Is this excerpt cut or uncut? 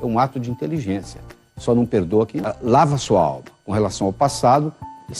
cut